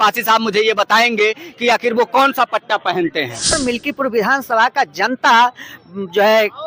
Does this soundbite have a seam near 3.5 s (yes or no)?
yes